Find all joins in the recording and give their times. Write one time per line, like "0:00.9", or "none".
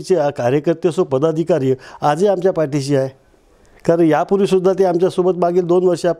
none